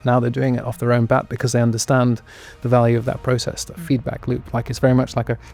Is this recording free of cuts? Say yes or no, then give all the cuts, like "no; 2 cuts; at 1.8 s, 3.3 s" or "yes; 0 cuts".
yes; 0 cuts